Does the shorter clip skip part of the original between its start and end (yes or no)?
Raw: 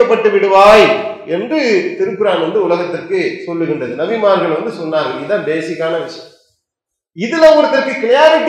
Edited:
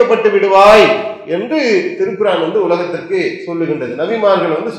no